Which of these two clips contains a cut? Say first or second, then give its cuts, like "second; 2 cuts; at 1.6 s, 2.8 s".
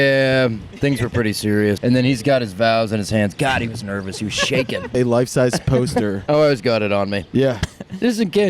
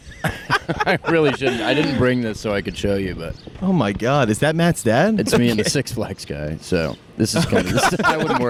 first; 2 cuts; at 1.8 s, 5.0 s